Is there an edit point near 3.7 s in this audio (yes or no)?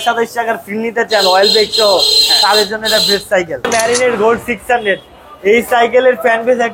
yes